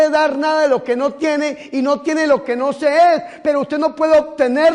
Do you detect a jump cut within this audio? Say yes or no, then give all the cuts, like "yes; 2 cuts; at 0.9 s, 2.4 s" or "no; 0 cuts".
no; 0 cuts